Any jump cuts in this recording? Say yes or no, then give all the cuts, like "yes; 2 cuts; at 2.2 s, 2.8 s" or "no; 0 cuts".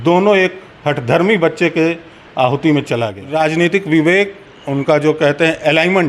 yes; 1 cut; at 3.2 s